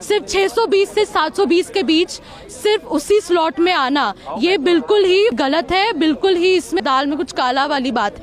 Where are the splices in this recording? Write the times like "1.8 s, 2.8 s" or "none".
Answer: 5.4 s, 6.8 s